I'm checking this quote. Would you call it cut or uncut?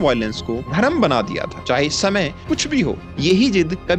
uncut